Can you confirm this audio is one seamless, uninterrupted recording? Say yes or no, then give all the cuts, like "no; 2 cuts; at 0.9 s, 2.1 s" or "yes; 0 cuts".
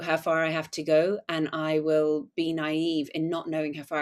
yes; 0 cuts